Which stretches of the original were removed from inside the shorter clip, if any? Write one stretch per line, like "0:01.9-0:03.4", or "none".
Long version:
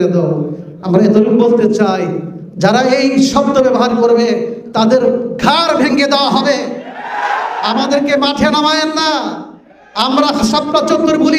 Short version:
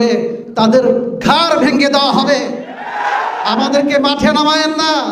none